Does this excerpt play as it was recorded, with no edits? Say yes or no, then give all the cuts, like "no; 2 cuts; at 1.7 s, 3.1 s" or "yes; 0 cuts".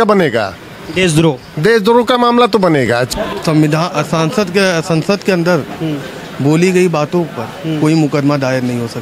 no; 1 cut; at 3.1 s